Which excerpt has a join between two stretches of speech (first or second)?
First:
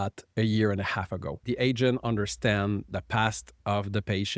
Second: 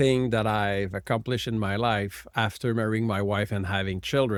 first